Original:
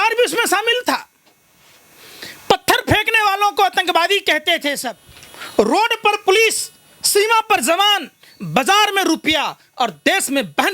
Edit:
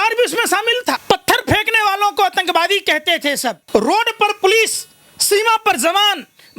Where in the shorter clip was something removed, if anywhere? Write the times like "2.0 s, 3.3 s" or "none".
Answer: 1.0 s, 3.6 s